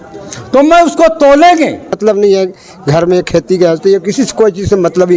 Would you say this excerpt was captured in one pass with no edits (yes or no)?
no